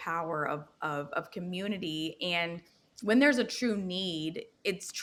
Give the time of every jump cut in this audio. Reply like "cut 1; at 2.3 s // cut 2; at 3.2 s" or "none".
none